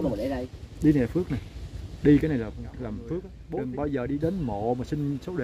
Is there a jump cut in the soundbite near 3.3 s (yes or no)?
yes